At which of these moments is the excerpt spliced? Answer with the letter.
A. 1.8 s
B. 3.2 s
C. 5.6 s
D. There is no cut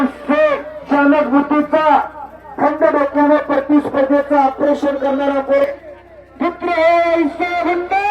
C